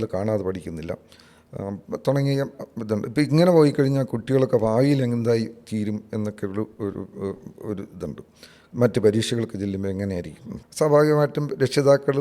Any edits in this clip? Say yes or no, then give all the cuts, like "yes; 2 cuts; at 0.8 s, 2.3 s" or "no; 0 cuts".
no; 0 cuts